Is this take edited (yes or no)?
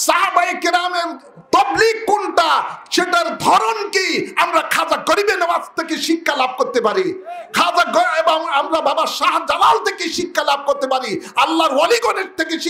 no